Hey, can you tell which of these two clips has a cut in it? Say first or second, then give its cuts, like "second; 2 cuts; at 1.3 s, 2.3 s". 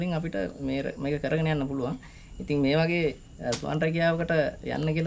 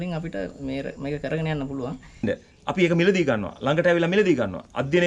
second; 1 cut; at 2.2 s